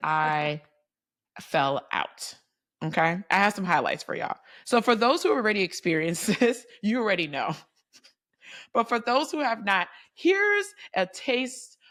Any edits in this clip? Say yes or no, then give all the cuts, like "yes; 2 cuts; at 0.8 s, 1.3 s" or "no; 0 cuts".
no; 0 cuts